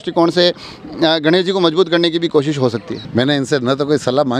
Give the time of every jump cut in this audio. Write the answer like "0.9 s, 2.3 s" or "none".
3.0 s